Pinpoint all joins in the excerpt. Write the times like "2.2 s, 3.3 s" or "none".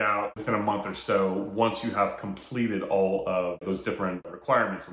none